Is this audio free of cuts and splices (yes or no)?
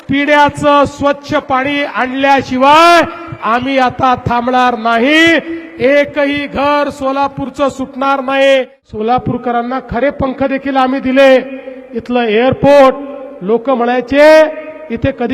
no